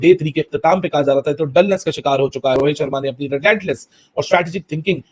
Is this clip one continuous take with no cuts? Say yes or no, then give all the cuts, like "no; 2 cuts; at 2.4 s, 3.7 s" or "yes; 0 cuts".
no; 1 cut; at 2.6 s